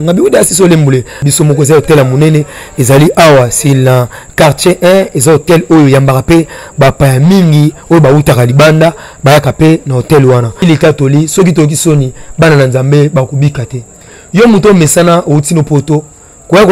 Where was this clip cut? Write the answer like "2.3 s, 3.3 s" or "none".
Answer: 1.2 s, 10.6 s